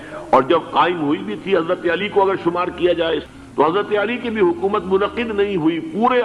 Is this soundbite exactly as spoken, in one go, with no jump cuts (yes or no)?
no